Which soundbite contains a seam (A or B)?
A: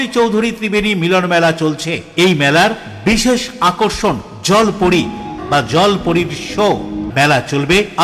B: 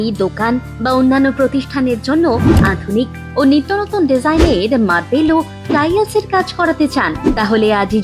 A